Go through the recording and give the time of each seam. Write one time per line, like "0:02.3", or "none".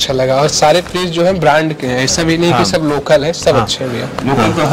none